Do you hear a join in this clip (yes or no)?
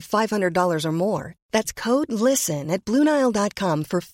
no